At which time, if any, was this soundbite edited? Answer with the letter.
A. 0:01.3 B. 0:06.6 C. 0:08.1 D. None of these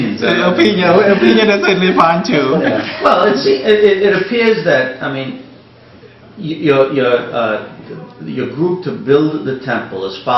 A